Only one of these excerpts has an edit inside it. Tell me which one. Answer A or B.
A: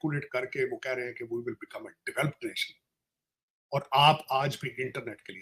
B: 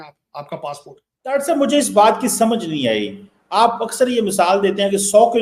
B